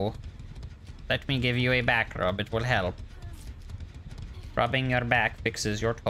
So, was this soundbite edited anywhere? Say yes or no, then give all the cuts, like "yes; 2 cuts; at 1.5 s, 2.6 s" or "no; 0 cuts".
no; 0 cuts